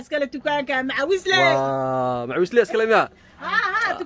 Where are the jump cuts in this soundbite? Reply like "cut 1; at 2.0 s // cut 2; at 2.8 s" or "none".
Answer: none